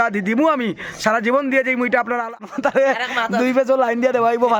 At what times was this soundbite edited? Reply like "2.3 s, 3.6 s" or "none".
2.4 s